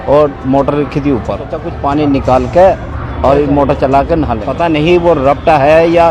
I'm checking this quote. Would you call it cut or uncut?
cut